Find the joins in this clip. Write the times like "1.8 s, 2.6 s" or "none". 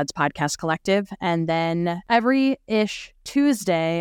none